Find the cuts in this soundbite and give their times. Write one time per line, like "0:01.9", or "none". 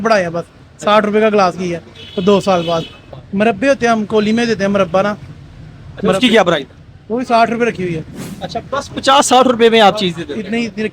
0:03.2